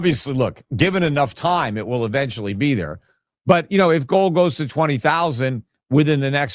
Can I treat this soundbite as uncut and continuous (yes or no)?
yes